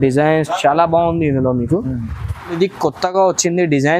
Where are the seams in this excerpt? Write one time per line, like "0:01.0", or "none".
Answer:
0:02.5